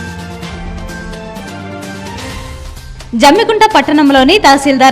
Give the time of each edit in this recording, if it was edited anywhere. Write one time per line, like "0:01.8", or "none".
0:00.9